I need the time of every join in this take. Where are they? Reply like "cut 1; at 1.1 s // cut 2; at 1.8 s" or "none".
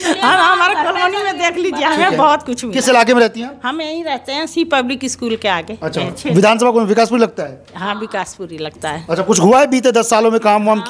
none